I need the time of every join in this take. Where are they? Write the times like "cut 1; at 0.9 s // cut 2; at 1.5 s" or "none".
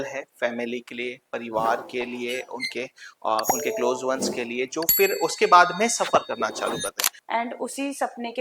cut 1; at 7.1 s